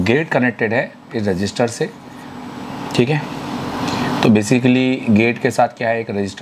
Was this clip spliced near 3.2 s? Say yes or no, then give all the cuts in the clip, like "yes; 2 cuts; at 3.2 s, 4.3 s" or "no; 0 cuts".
no; 0 cuts